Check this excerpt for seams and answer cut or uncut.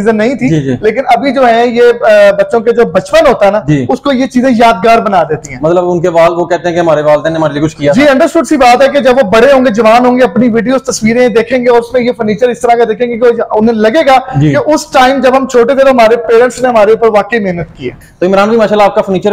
uncut